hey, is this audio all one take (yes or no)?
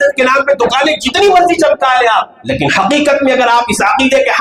yes